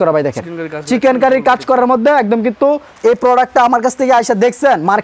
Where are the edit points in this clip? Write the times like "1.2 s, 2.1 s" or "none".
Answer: 2.9 s

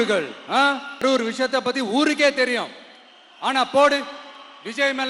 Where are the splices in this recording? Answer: 1.0 s

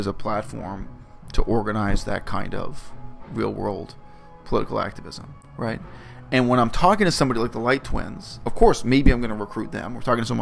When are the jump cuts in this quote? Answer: none

